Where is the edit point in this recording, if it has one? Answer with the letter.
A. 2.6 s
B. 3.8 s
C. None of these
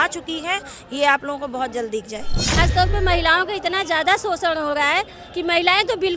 A